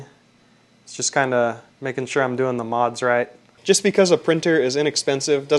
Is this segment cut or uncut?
cut